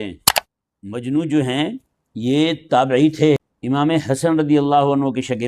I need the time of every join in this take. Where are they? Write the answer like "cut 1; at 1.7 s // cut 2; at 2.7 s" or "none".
cut 1; at 3.5 s